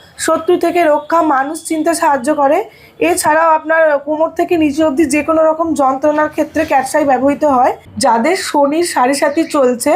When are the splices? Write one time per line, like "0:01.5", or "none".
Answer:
0:07.9